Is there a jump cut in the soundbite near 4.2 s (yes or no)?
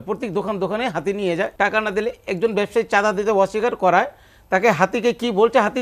no